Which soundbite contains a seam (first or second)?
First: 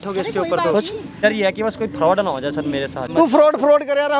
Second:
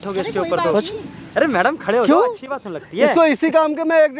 first